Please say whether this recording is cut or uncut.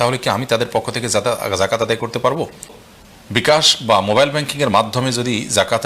cut